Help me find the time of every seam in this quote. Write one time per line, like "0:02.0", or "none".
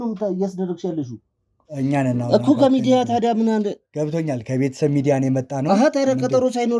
none